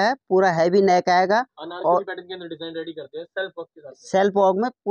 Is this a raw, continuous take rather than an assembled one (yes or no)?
yes